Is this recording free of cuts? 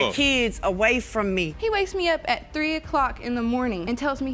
no; 1 cut; at 1.5 s

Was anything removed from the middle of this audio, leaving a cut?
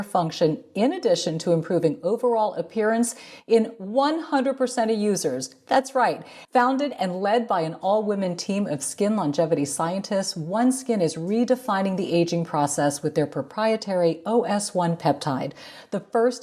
yes; 1 cut; at 6.3 s

